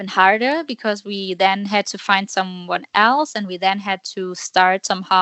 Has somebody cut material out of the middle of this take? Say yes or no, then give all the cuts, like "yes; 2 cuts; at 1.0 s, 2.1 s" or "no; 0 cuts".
no; 0 cuts